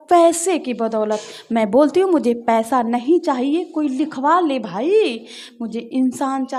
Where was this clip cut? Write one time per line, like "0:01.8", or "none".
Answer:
none